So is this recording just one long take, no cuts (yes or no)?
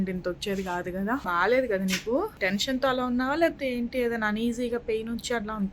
no